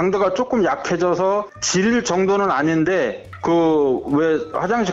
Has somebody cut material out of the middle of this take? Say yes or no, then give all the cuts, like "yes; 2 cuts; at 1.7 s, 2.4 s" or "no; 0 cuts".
no; 0 cuts